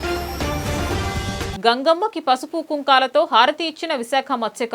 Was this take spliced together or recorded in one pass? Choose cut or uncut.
uncut